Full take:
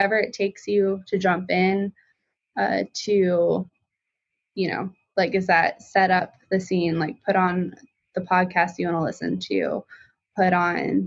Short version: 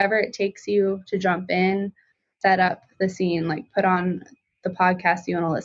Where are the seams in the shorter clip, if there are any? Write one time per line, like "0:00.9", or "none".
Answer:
0:02.3

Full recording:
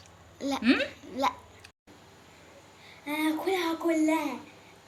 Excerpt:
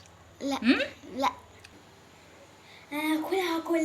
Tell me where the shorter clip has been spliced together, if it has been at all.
0:01.7

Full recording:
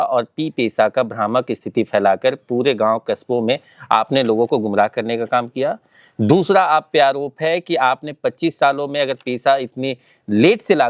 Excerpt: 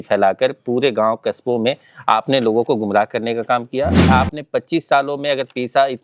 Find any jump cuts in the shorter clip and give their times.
0:04.1

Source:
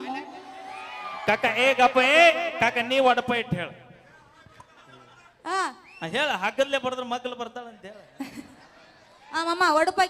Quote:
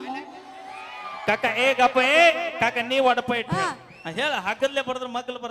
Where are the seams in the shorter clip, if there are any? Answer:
0:03.5

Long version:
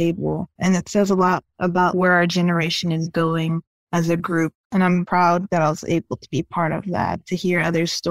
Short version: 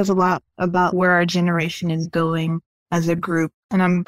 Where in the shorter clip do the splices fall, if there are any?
none

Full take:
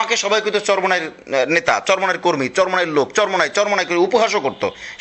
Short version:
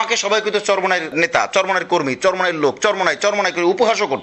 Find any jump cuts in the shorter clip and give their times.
0:01.1

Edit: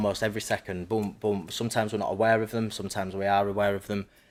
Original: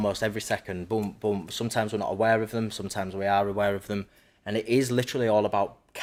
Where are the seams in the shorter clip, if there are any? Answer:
none

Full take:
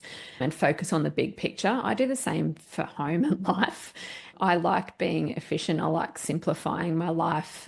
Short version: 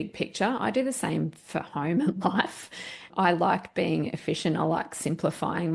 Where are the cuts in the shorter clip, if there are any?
none

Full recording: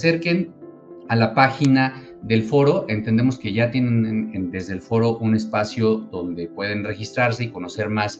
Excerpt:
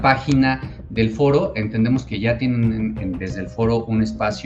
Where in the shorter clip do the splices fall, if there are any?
none

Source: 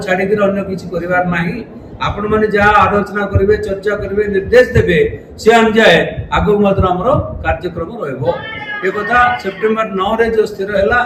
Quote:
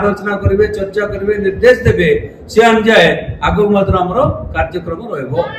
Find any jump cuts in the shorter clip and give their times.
none

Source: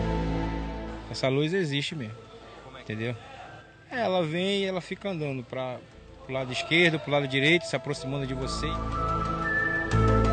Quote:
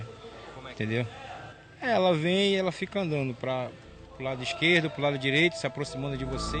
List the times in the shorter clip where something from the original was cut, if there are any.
none

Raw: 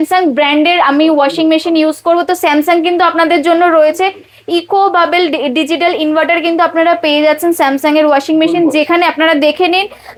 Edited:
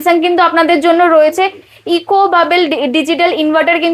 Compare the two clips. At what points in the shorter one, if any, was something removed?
none

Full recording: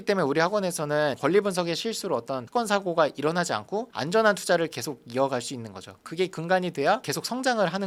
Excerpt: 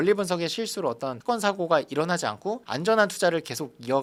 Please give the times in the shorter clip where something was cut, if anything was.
none

